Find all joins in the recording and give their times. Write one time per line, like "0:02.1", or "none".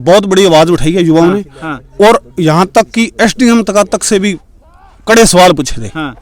none